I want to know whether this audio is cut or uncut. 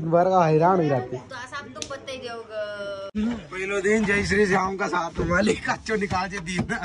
cut